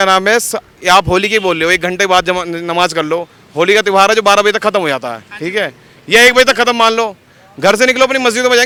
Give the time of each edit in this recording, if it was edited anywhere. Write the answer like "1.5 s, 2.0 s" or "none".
none